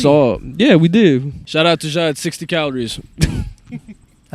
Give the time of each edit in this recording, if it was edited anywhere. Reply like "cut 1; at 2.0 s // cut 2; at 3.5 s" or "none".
cut 1; at 1.4 s